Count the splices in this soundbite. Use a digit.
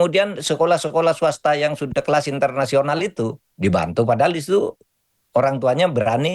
1